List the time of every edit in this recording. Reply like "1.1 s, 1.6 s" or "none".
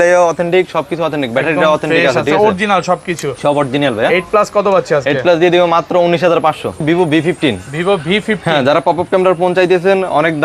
6.8 s